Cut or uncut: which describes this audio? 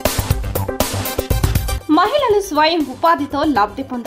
cut